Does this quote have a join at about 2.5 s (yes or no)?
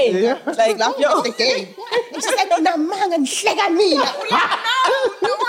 no